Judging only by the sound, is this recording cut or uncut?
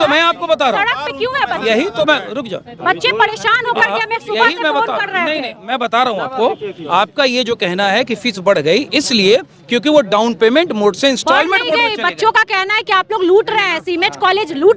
uncut